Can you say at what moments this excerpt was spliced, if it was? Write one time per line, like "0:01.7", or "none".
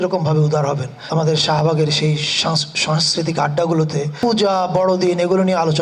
0:01.0
0:04.1

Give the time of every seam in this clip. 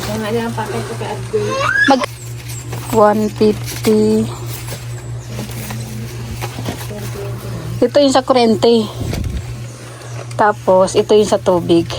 none

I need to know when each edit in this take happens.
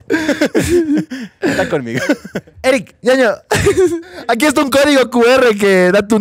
0:02.5
0:04.1

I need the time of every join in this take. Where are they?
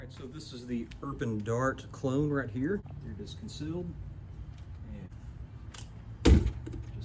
0:03.0
0:05.1

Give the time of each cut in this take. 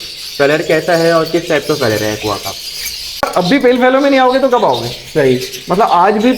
0:03.3

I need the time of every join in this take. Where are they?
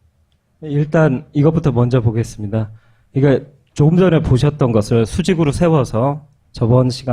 0:04.4

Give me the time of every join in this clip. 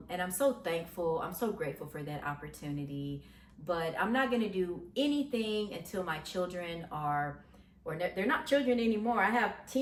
none

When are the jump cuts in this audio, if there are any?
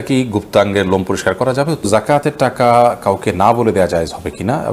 0:01.9

